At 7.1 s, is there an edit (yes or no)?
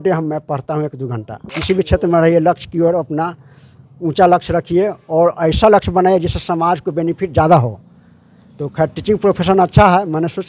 no